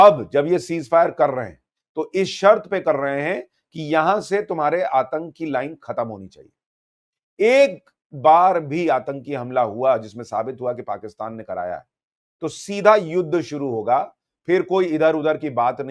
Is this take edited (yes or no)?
no